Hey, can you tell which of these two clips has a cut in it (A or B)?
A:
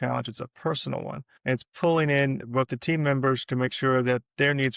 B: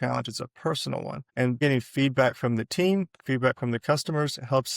B